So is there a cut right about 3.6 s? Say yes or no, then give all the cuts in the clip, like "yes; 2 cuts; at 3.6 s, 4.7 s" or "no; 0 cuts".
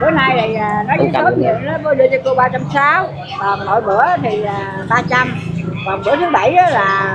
no; 0 cuts